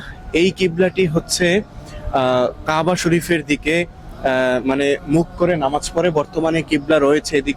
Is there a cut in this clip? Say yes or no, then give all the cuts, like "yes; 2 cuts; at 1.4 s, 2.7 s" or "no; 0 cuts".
no; 0 cuts